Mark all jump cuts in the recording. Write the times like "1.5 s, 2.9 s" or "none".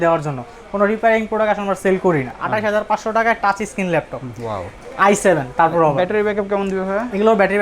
2.3 s